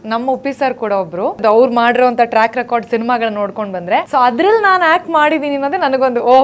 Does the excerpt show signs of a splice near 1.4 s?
yes; 2 cuts; at 1.4 s, 4.1 s

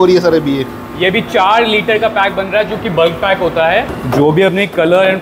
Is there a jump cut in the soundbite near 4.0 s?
yes; 1 cut; at 4.0 s

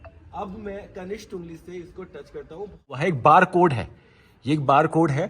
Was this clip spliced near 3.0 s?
yes; 1 cut; at 3.0 s

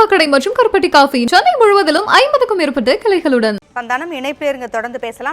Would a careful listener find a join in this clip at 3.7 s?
yes; 1 cut; at 3.7 s

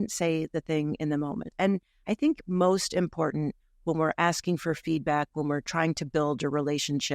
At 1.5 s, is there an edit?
yes; 1 cut; at 1.5 s

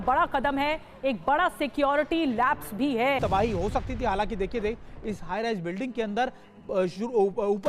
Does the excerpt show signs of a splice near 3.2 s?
yes; 1 cut; at 3.2 s

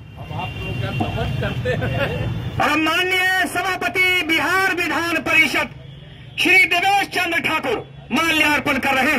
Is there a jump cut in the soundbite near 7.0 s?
no; 0 cuts

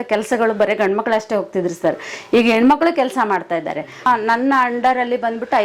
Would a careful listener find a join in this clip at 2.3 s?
no; 1 cut; at 4.1 s

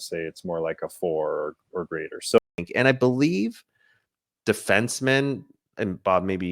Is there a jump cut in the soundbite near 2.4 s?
yes; 1 cut; at 2.4 s

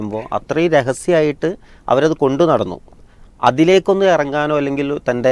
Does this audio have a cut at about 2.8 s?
no; 0 cuts

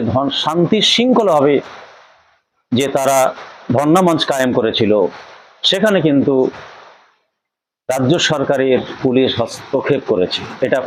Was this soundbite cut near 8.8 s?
no; 0 cuts

